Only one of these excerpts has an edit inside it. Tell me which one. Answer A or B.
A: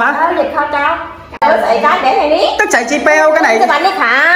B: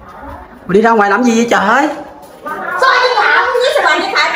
A